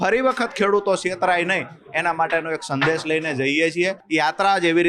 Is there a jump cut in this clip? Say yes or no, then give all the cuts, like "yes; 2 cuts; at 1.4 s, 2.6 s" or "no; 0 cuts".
yes; 1 cut; at 4.0 s